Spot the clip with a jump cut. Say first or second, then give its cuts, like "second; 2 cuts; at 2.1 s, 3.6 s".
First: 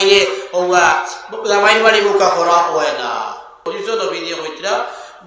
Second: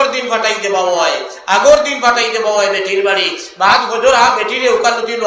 first; 1 cut; at 3.7 s